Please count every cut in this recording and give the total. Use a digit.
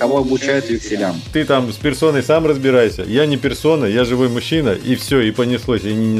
1